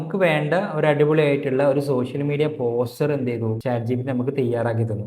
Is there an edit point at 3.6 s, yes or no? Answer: yes